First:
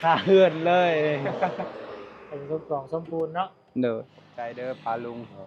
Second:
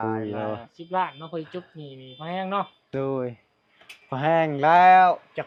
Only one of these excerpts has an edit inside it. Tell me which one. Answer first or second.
first